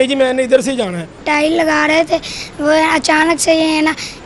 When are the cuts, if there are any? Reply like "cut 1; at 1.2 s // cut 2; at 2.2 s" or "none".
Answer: cut 1; at 1.2 s